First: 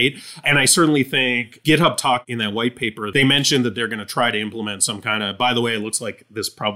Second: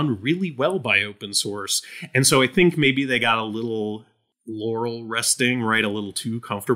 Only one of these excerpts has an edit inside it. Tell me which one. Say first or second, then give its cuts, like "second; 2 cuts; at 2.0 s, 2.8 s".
first; 2 cuts; at 1.5 s, 3.0 s